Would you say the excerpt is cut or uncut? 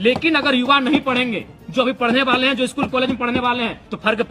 uncut